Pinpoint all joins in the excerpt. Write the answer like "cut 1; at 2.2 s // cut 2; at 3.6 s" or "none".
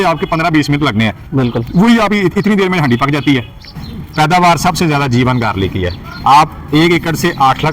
cut 1; at 3.8 s